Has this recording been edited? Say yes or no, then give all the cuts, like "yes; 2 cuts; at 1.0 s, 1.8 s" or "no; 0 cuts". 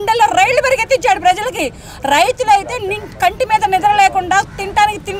no; 0 cuts